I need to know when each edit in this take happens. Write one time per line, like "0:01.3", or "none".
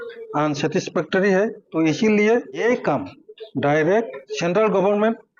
0:01.6
0:02.6
0:04.3